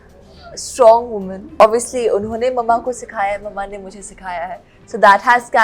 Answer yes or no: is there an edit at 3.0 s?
no